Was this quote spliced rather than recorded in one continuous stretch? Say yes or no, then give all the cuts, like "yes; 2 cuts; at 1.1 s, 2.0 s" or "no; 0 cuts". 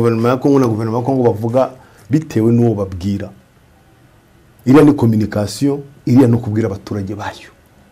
no; 0 cuts